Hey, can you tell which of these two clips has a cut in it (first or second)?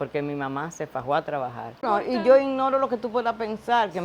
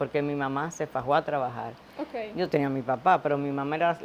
first